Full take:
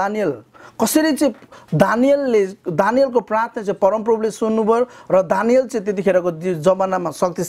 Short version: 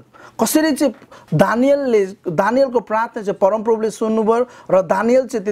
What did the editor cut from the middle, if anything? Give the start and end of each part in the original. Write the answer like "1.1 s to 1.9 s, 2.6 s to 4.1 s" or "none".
none